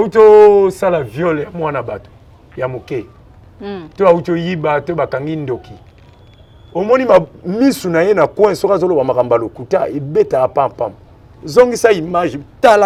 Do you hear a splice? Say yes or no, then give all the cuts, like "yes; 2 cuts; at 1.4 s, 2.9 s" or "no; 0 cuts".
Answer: no; 0 cuts